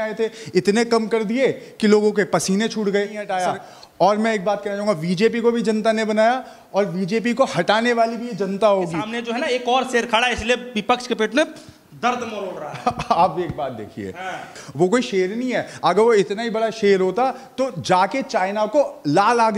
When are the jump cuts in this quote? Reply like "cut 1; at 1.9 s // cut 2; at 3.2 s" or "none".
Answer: cut 1; at 3.3 s // cut 2; at 9.1 s